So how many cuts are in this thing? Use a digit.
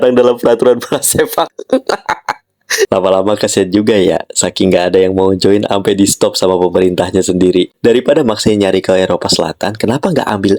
1